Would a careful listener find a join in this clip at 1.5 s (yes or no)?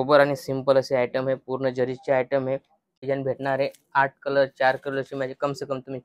no